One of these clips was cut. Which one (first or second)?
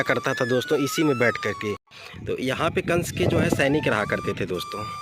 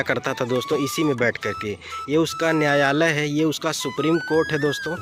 first